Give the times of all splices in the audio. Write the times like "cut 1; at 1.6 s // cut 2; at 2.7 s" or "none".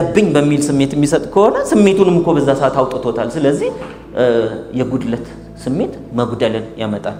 none

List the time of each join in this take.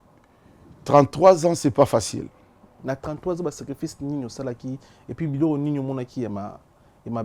cut 1; at 2.8 s

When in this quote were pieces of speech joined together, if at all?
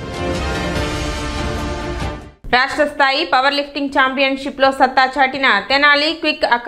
cut 1; at 2.3 s

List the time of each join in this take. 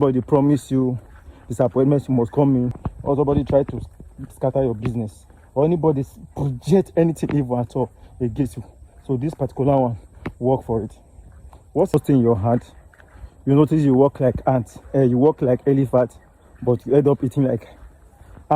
cut 1; at 2.8 s // cut 2; at 11.9 s

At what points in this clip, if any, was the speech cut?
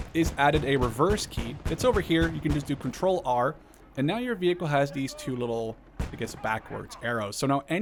none

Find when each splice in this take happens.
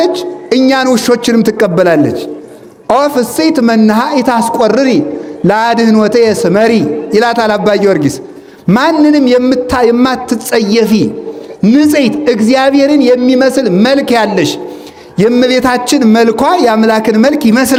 none

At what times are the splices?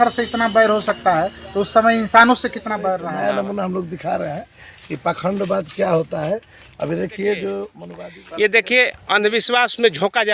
cut 1; at 2.9 s // cut 2; at 8.0 s

